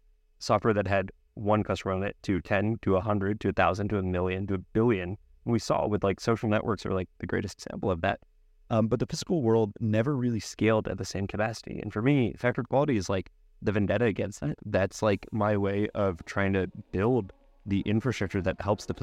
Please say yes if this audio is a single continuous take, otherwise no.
yes